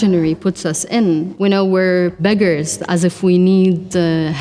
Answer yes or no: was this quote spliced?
yes